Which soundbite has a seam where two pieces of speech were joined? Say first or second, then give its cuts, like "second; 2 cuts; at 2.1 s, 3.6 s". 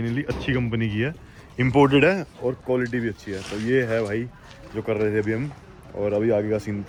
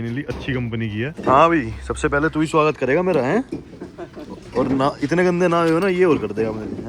second; 1 cut; at 1.1 s